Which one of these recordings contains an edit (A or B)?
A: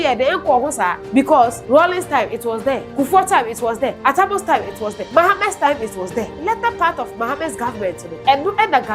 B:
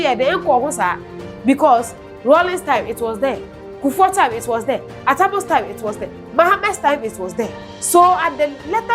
A